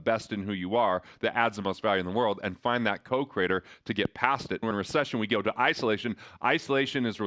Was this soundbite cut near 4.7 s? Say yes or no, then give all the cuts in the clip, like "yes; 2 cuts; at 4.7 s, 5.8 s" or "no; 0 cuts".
yes; 1 cut; at 4.7 s